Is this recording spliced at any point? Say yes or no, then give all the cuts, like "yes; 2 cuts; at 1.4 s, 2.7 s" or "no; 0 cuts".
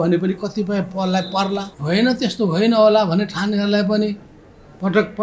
yes; 1 cut; at 1.7 s